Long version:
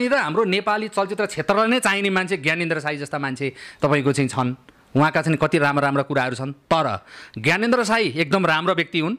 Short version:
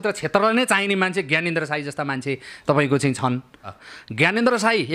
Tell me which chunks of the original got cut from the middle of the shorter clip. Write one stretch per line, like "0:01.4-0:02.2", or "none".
0:04.8-0:07.0